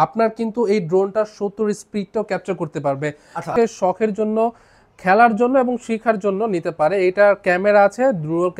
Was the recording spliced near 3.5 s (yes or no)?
yes